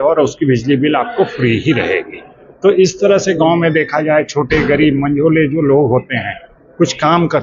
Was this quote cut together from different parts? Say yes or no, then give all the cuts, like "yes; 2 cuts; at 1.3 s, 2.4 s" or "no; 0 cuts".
no; 0 cuts